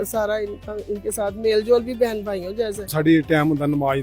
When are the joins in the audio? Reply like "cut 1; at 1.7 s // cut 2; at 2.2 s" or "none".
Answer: cut 1; at 2.9 s